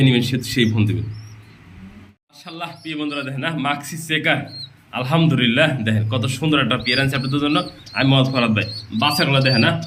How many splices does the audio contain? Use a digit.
0